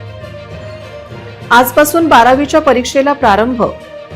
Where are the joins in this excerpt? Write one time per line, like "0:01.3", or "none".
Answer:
0:01.0